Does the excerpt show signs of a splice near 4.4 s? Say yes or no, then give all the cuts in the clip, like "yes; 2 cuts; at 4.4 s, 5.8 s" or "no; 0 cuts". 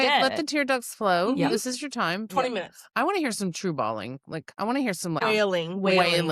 yes; 2 cuts; at 4.4 s, 5.2 s